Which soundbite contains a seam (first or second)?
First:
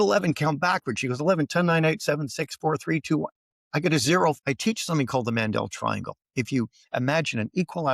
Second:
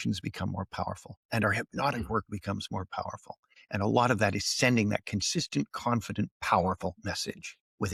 first